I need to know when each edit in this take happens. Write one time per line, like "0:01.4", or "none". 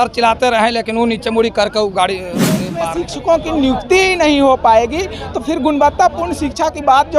0:02.8

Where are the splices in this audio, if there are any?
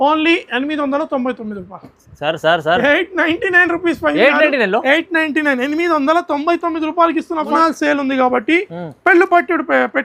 0:07.5

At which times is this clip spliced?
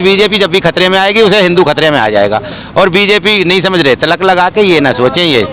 none

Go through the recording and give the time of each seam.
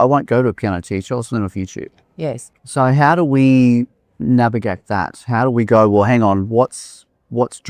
none

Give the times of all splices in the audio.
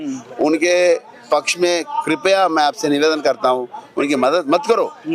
none

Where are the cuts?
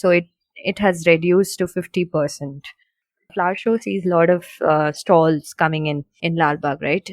0:03.3
0:06.1

